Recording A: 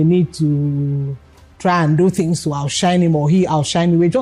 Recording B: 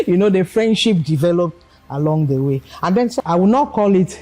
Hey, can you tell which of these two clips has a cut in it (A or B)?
B